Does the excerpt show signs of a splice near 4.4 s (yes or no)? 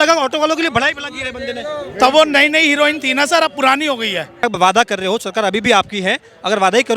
yes